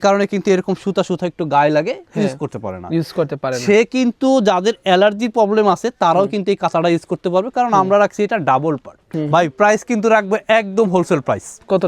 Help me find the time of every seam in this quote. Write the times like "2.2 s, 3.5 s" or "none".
9.1 s